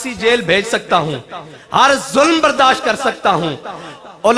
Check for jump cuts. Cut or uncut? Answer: uncut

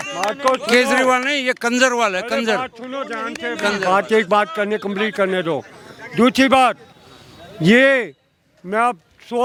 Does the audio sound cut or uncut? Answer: uncut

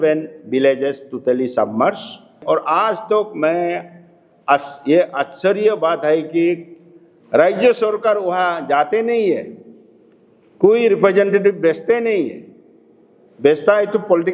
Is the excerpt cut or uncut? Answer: cut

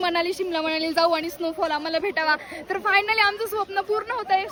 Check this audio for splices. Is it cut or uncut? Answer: uncut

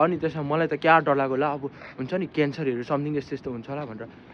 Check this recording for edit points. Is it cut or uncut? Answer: uncut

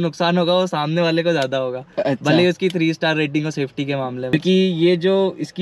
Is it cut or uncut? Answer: uncut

